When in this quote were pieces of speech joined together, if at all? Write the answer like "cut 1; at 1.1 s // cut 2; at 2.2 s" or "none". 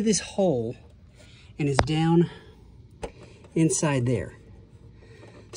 none